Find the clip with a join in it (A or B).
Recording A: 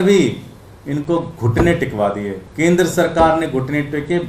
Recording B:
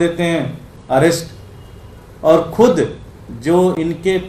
A